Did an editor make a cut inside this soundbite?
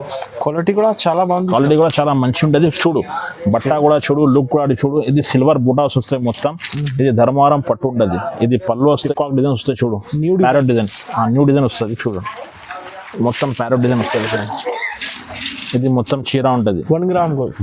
yes; 1 cut; at 9.0 s

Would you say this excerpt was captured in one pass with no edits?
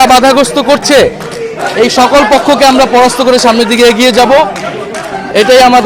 yes; 0 cuts

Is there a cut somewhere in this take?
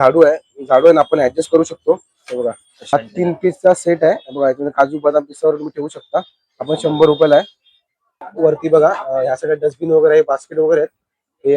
yes; 2 cuts; at 2.9 s, 8.3 s

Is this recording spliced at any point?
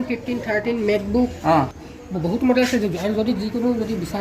yes; 1 cut; at 2.0 s

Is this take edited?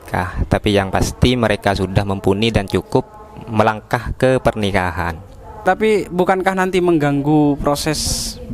yes; 1 cut; at 5.7 s

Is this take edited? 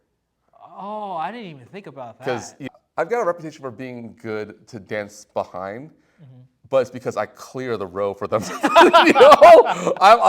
yes; 1 cut; at 2.7 s

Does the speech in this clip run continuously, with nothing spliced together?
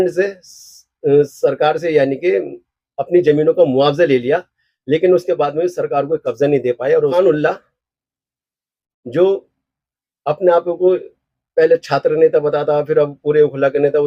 no; 1 cut; at 7.1 s

